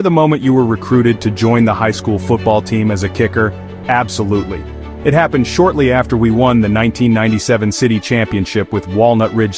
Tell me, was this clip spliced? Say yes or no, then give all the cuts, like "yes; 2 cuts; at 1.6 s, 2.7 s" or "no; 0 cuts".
no; 0 cuts